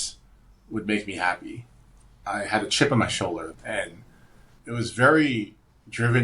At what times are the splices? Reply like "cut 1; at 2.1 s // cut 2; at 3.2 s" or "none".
cut 1; at 2.1 s // cut 2; at 3.5 s